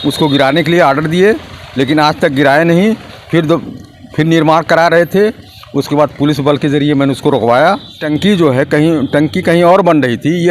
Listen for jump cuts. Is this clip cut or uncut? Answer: cut